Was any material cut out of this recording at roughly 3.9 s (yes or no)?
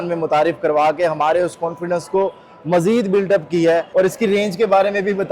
yes